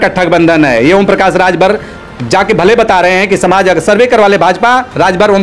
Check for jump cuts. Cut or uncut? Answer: uncut